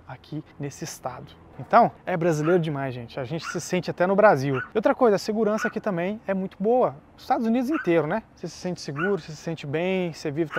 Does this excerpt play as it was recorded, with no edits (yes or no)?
no